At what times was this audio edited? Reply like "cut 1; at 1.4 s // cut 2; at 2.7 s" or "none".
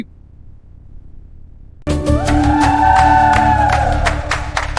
none